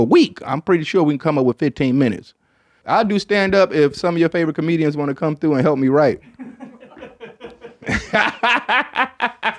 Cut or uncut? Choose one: cut